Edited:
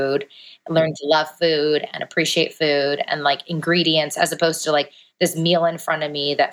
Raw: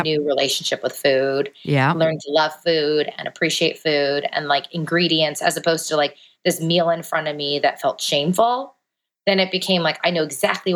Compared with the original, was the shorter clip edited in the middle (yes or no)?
no